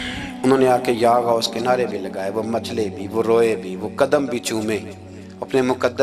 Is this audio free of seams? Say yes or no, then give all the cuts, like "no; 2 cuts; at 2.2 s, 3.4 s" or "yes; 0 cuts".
yes; 0 cuts